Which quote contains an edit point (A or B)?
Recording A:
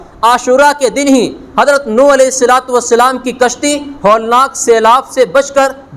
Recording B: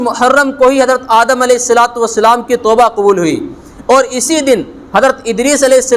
B